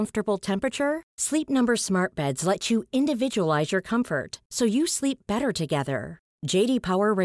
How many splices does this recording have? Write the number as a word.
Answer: zero